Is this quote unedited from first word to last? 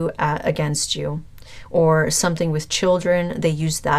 yes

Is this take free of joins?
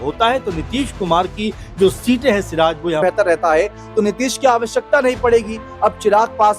no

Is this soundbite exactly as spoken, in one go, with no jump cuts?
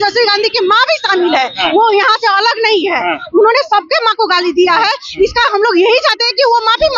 yes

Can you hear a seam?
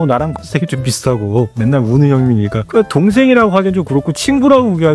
yes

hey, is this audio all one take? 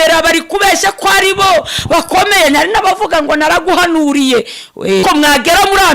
no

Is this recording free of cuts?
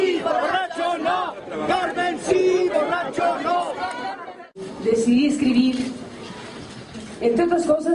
no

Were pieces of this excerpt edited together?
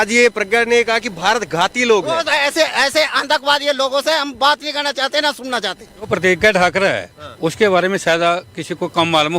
yes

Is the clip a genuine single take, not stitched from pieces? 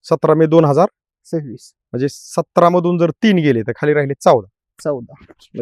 yes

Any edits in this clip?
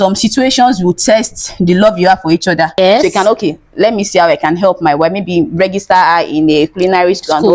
yes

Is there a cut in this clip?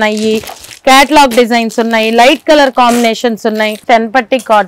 yes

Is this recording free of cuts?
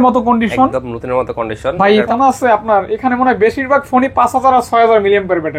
no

